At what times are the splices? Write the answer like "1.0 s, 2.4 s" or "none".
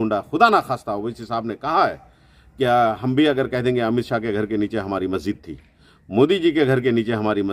none